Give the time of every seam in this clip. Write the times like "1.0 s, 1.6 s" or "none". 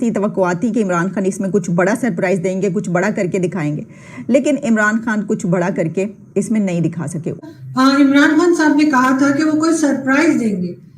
7.3 s